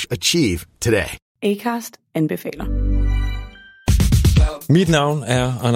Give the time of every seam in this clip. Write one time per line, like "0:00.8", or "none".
0:01.2